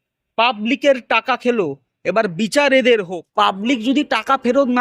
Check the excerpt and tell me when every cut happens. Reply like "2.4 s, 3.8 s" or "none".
3.2 s